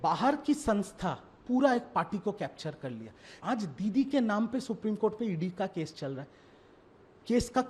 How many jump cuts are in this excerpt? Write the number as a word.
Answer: one